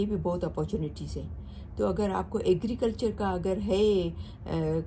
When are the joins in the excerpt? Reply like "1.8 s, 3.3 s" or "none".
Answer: none